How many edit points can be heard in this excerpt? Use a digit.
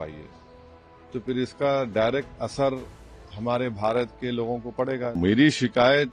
1